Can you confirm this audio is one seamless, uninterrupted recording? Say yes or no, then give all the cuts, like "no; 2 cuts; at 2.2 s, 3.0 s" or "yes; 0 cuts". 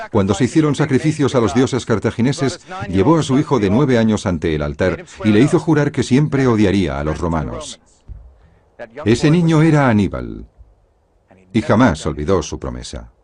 no; 1 cut; at 3.5 s